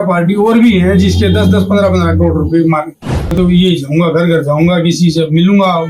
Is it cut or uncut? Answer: cut